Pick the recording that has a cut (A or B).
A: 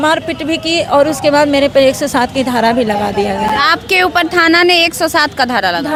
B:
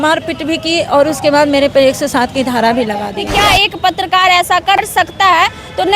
B